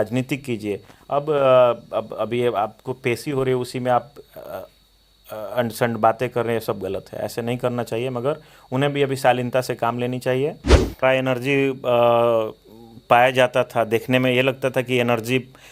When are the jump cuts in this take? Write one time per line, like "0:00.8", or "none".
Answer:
0:11.0